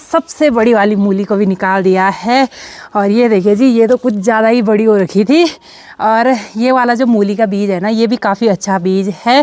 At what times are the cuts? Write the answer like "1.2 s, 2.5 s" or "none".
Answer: none